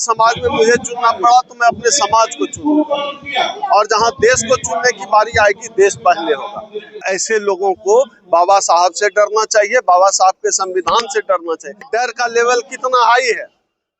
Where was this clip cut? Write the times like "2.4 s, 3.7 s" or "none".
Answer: 7.0 s, 11.9 s